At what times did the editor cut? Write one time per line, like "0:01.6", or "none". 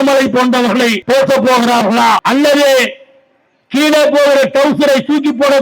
0:01.0
0:02.2